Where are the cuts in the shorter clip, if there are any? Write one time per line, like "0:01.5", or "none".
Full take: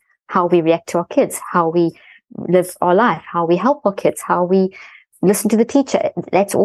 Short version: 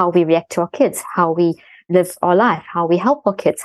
0:01.7